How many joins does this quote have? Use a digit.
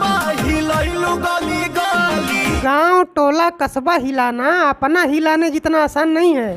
1